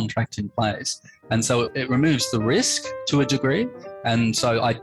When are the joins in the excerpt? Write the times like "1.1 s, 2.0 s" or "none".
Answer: 1.7 s